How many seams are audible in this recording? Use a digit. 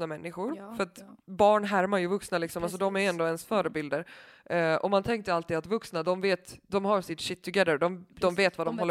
0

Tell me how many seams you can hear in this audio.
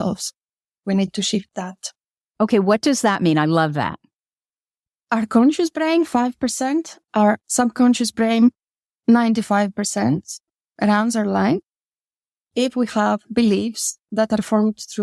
0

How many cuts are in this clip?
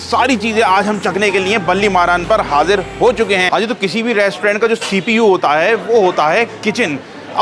1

